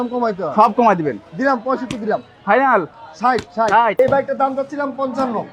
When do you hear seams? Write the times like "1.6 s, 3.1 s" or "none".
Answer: 3.9 s